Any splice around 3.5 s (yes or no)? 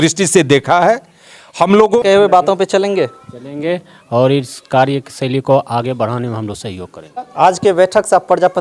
no